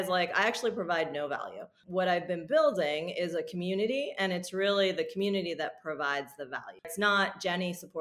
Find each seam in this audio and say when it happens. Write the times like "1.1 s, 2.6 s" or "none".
1.8 s, 6.9 s